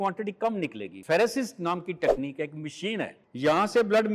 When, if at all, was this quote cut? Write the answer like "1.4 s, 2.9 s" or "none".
0.9 s, 3.2 s